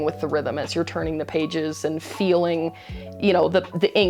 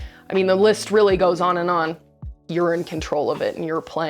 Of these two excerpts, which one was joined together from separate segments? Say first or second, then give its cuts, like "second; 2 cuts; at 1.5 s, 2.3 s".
second; 1 cut; at 2.4 s